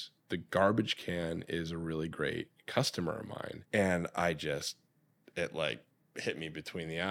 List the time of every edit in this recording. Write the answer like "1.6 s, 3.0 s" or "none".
none